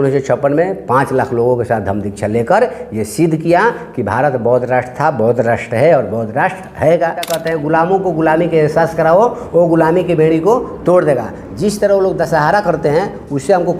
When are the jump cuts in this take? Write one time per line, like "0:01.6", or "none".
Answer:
0:07.3